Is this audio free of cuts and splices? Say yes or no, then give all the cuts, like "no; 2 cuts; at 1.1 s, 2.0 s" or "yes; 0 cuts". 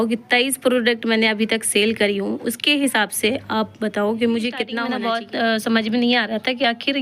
no; 1 cut; at 4.8 s